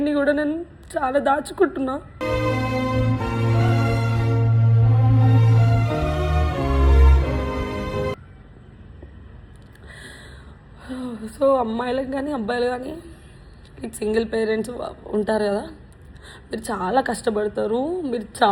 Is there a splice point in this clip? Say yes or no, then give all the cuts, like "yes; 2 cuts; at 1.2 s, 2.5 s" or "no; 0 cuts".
no; 0 cuts